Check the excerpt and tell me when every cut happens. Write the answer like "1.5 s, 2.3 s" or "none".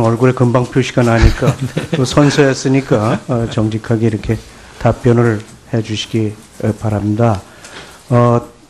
none